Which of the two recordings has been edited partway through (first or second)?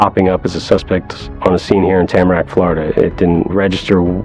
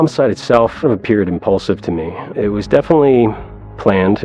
second